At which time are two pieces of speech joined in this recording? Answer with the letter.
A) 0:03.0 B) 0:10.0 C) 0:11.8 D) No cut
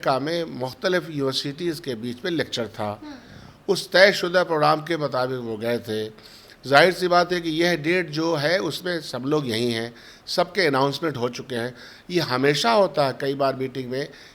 D